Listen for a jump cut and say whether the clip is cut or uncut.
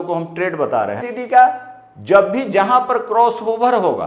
cut